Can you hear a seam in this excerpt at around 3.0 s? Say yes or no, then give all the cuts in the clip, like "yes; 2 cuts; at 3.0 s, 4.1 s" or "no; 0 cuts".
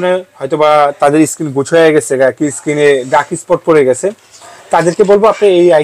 no; 0 cuts